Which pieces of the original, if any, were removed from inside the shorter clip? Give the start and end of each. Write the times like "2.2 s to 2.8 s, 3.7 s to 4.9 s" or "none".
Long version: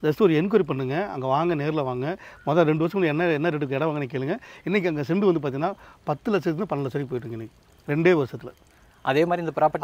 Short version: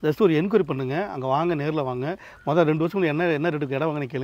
none